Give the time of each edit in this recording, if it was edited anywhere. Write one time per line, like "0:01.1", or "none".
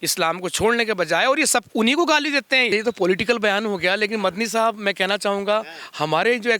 0:02.7